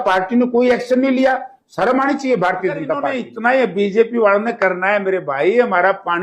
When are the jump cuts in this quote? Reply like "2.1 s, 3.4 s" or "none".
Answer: 3.2 s